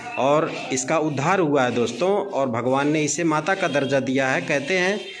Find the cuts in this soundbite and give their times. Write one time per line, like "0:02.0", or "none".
none